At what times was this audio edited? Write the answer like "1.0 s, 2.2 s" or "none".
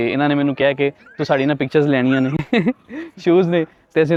none

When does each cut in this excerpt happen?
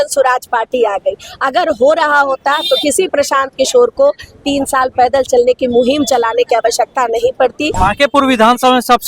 7.7 s

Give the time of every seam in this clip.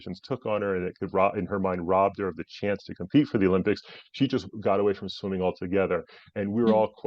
4.5 s

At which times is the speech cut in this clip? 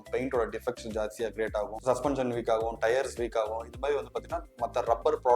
1.7 s

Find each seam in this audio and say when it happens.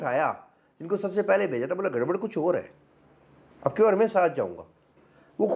none

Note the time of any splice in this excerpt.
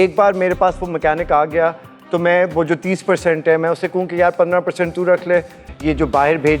1.9 s, 5.6 s

